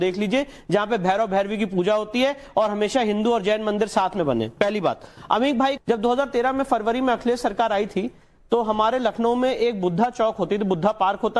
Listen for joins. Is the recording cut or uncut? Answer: cut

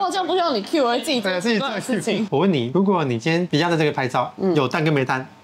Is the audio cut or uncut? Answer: cut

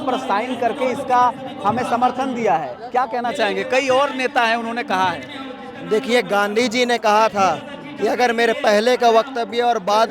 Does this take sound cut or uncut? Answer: uncut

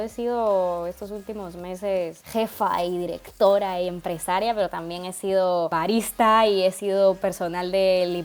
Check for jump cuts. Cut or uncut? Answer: cut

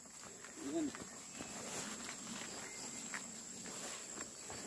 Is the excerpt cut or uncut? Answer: uncut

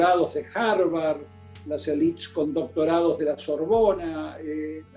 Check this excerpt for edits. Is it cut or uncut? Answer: uncut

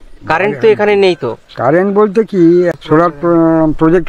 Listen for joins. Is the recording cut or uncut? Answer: cut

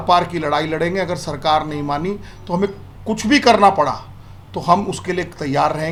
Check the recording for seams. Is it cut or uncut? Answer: uncut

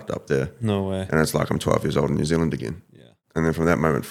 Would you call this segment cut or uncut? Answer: cut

